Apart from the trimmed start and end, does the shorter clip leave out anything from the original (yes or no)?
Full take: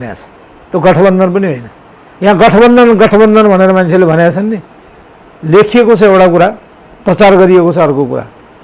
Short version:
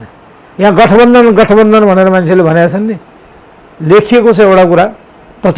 no